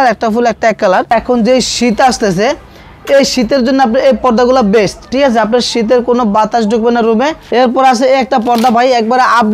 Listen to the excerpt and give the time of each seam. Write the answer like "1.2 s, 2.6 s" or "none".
1.1 s, 7.4 s